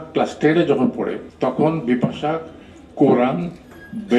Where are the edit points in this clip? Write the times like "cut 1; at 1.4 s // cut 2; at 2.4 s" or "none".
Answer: cut 1; at 1.2 s